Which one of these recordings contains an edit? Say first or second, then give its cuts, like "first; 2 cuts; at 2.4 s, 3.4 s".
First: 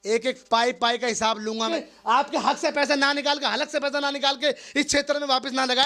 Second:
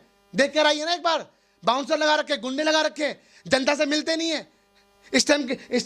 first; 1 cut; at 1.7 s